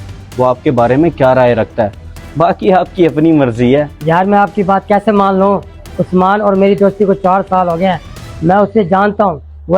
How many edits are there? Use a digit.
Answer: 1